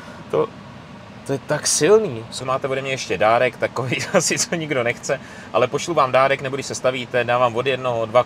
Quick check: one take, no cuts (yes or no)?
no